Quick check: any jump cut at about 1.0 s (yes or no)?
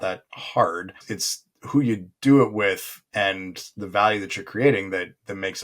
yes